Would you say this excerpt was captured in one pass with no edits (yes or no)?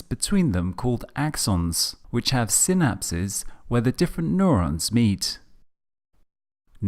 yes